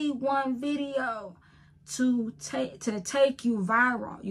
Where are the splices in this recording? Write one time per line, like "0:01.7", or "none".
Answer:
none